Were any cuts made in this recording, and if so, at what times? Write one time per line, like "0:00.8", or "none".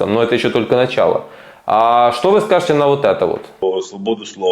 0:03.5